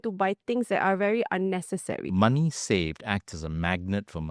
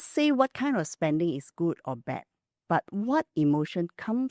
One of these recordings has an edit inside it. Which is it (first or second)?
first